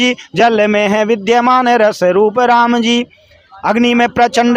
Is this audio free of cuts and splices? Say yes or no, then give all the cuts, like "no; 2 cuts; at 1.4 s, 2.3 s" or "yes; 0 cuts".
yes; 0 cuts